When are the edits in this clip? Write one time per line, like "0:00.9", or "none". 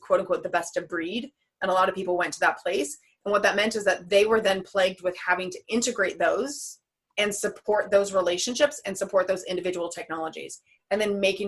none